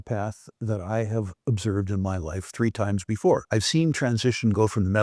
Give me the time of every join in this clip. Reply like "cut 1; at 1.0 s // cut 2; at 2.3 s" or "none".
cut 1; at 3.4 s

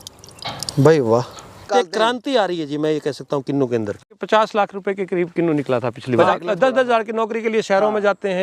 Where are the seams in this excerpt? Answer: cut 1; at 1.7 s // cut 2; at 4.1 s // cut 3; at 6.1 s

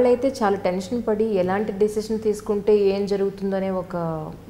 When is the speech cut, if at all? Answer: none

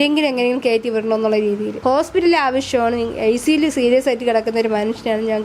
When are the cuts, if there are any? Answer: cut 1; at 1.7 s

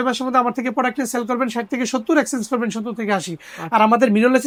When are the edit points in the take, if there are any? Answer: none

